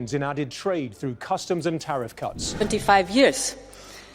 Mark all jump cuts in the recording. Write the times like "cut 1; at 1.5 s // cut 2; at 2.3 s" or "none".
cut 1; at 2.5 s